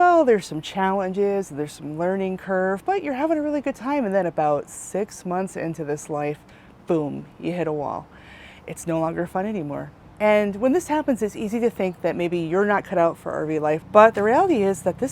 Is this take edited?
yes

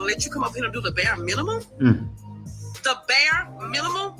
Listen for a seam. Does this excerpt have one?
no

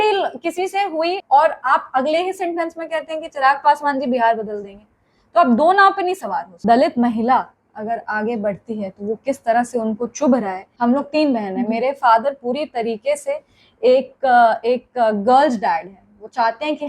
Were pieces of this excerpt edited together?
yes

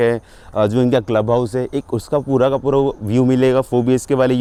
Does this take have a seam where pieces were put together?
no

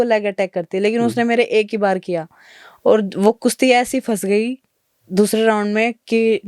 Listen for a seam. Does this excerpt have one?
no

